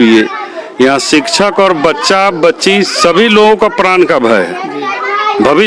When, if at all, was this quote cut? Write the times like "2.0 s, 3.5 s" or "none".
none